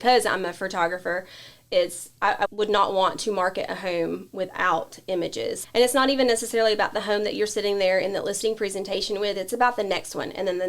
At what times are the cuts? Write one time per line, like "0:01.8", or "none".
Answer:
0:02.5